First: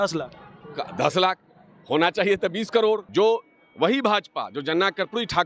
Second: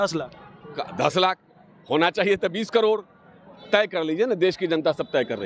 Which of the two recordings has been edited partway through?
first; 1 cut; at 3.1 s

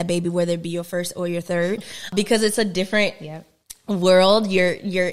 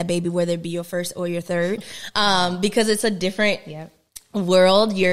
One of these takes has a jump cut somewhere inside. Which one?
first; 1 cut; at 2.1 s

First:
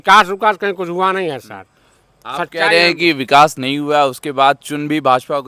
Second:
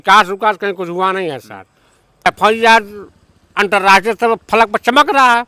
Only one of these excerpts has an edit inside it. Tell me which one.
second; 1 cut; at 2.3 s

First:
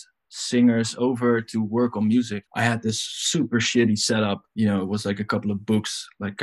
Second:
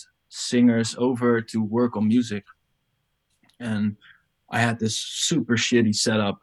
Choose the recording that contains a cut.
first; 2 cuts; at 2.5 s, 4.5 s

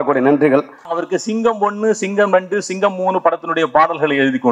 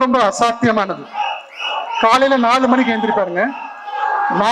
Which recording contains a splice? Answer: first; 1 cut; at 1.0 s

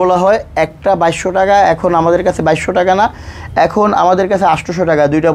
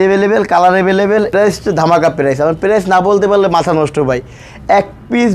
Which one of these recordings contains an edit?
second; 1 cut; at 1.3 s

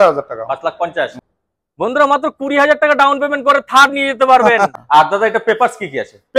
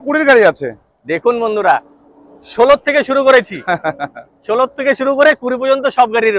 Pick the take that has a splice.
first; 2 cuts; at 1.2 s, 4.7 s

